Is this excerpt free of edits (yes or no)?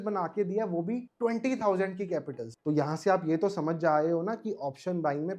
yes